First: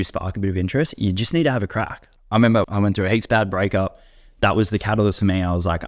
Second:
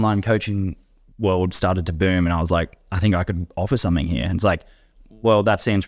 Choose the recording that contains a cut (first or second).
first